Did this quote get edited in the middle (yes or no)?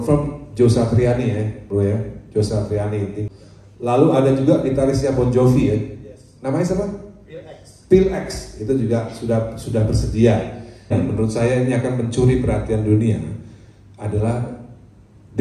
yes